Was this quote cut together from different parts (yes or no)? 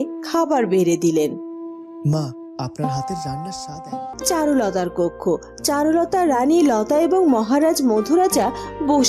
yes